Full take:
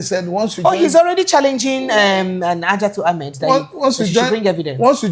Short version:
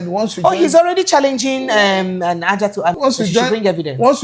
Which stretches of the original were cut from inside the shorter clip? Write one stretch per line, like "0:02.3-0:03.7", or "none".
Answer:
0:03.2-0:03.8